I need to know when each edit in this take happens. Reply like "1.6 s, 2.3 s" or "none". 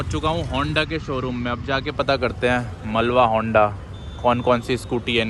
none